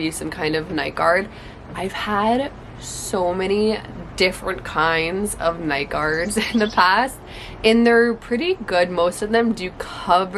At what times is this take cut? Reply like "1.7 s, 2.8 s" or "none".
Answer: none